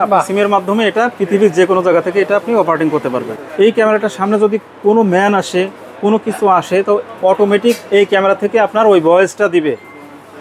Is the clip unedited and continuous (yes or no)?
no